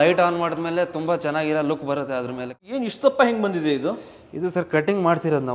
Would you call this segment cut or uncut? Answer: cut